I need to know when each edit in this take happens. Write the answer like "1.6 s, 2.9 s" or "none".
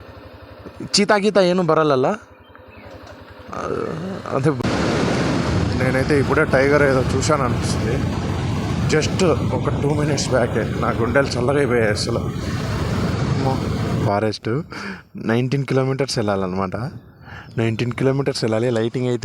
4.6 s, 14.0 s